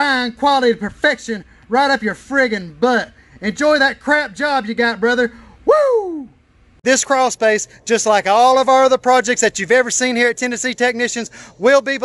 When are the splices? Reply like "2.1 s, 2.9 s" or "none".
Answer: 6.6 s